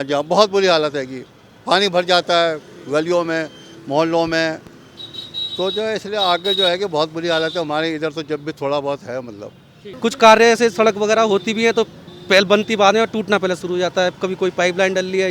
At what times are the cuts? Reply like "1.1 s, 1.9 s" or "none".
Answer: 9.8 s